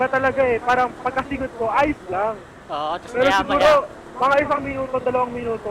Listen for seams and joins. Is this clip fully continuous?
yes; 0 cuts

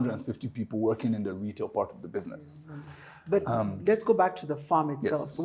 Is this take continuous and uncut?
yes; 0 cuts

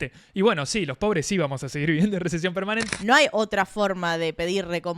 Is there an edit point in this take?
yes; 1 cut; at 2.8 s

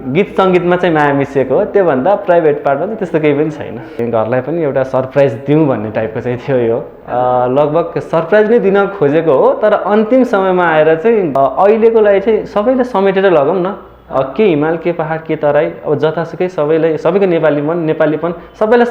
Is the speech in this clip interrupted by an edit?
yes; 2 cuts; at 4.0 s, 11.3 s

